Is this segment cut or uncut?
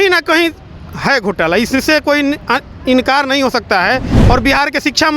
cut